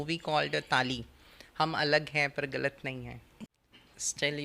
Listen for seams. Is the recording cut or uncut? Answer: cut